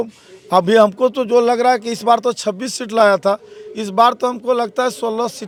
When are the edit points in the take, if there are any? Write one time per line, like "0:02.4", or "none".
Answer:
none